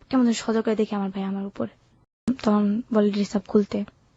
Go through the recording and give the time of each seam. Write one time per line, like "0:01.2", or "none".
0:02.3